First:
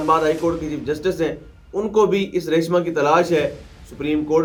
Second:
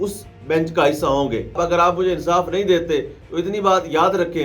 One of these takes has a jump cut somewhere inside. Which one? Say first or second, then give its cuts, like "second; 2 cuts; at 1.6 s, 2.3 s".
second; 1 cut; at 1.6 s